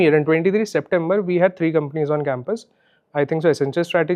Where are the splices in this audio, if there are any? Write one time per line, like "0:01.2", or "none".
none